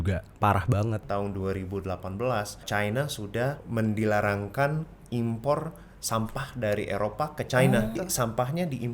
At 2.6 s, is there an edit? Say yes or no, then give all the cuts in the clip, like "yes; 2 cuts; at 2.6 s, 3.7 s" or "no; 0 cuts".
yes; 4 cuts; at 1.0 s, 2.6 s, 3.6 s, 8.0 s